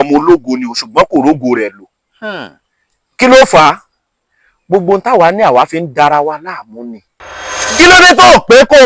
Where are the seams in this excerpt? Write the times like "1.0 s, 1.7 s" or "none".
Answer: 7.7 s